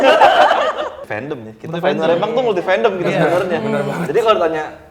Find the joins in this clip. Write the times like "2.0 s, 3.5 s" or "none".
1.0 s